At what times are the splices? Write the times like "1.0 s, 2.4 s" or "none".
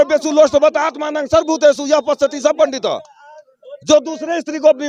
none